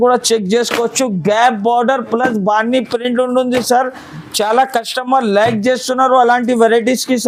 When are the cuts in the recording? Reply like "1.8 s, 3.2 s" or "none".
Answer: none